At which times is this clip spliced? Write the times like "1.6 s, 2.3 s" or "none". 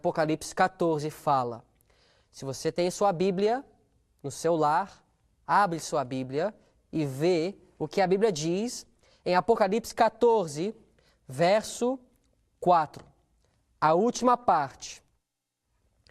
2.3 s

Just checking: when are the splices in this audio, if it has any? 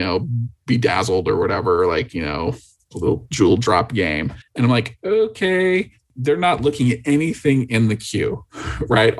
4.4 s

